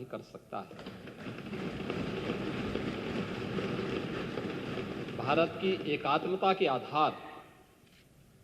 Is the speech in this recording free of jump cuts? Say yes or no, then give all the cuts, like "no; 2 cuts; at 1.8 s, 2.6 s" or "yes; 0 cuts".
yes; 0 cuts